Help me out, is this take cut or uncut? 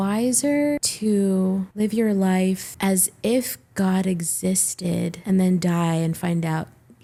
uncut